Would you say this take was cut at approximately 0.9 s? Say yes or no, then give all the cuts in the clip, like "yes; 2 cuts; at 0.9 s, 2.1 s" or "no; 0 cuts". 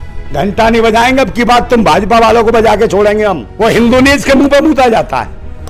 no; 1 cut; at 3.5 s